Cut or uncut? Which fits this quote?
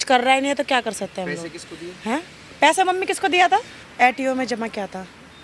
uncut